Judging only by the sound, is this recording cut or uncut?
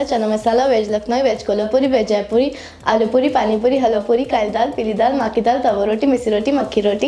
uncut